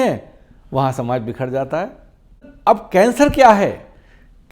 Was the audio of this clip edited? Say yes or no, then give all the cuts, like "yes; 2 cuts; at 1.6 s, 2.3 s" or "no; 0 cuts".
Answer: yes; 1 cut; at 2.5 s